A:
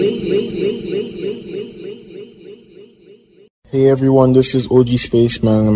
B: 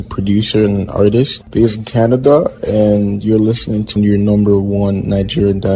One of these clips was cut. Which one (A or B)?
A